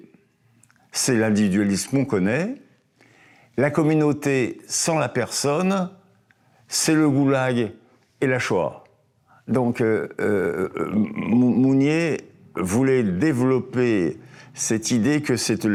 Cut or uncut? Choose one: uncut